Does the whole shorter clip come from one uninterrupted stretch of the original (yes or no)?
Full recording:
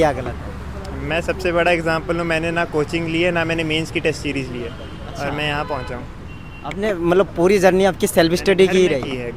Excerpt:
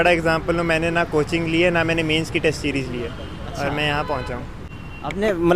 yes